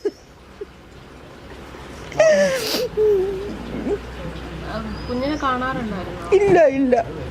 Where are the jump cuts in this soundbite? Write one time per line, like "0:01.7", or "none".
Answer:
none